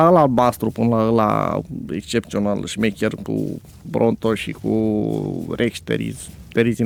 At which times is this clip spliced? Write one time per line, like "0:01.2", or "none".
none